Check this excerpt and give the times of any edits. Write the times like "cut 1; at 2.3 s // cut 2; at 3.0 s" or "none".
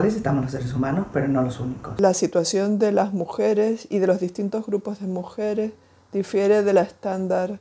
cut 1; at 2.0 s

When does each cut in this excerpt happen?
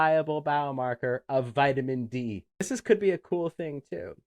cut 1; at 2.7 s

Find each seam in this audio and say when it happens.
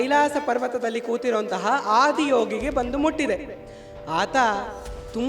none

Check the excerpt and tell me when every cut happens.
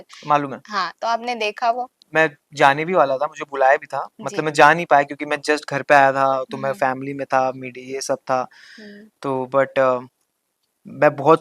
cut 1; at 1.9 s

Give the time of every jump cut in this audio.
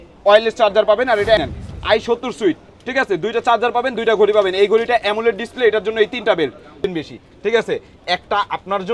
cut 1; at 1.4 s // cut 2; at 6.8 s

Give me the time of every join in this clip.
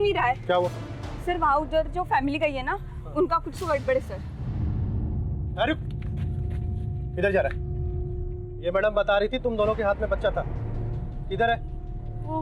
none

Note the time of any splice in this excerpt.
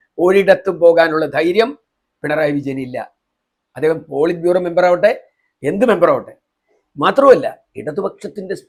none

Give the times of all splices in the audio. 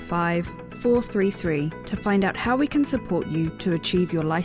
none

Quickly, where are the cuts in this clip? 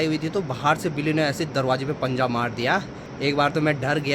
cut 1; at 3.0 s

